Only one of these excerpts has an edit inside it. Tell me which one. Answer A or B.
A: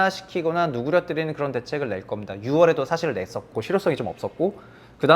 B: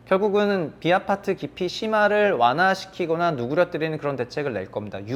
A